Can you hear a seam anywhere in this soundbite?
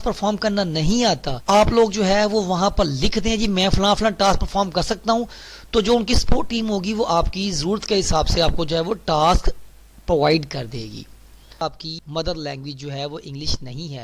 yes; 2 cuts; at 1.3 s, 11.7 s

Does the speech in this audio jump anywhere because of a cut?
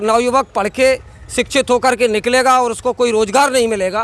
no; 0 cuts

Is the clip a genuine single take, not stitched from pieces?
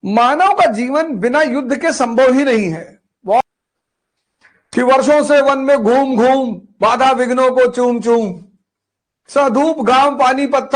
no; 1 cut; at 3.4 s

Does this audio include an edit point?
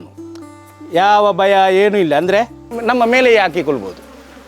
yes; 1 cut; at 2.8 s

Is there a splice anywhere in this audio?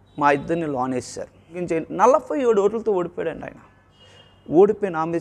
yes; 1 cut; at 1.6 s

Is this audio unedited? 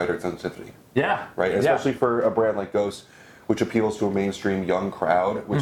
yes; 0 cuts

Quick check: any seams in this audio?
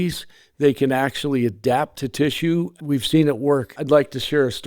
yes; 1 cut; at 3.7 s

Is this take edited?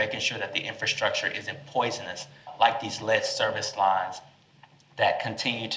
yes; 1 cut; at 2.4 s

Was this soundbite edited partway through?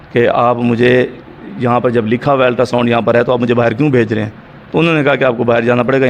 no; 0 cuts

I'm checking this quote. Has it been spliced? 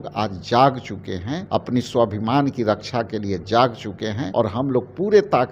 yes; 2 cuts; at 1.3 s, 4.2 s

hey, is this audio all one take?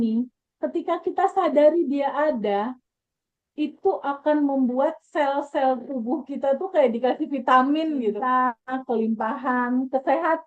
no; 1 cut; at 8.3 s

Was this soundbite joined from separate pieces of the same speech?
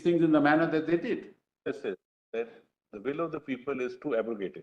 yes; 1 cut; at 1.6 s

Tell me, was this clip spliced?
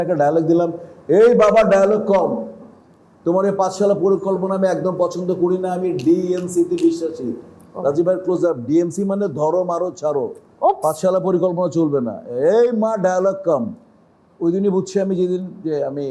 no; 0 cuts

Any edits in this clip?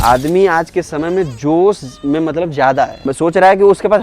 yes; 1 cut; at 3.0 s

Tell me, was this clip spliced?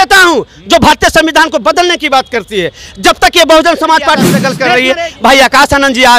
yes; 1 cut; at 4.5 s

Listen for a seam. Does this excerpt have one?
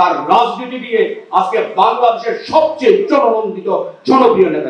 no; 0 cuts

